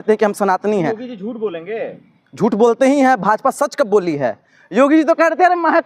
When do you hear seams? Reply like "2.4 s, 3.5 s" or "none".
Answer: none